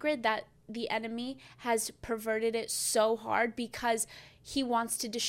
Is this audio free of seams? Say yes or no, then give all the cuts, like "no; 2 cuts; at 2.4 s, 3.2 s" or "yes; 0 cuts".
yes; 0 cuts